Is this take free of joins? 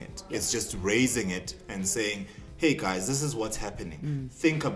yes; 0 cuts

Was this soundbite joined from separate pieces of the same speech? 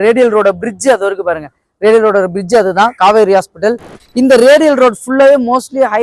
yes; 1 cut; at 3.9 s

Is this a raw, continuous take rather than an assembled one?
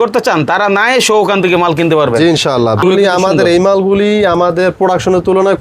no; 1 cut; at 2.8 s

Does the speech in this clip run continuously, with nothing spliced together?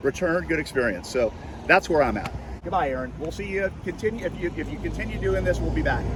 yes; 0 cuts

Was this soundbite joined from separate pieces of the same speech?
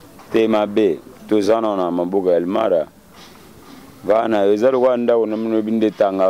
no; 0 cuts

